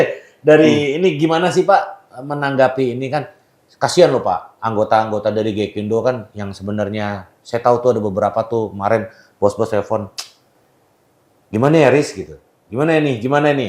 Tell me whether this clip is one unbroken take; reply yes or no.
yes